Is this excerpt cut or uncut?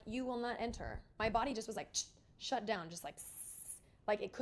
uncut